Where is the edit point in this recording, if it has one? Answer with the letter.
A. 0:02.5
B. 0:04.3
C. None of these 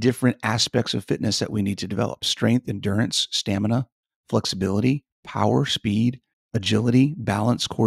C